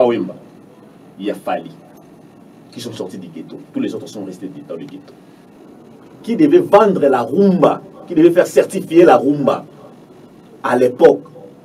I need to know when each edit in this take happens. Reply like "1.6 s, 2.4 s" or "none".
5.5 s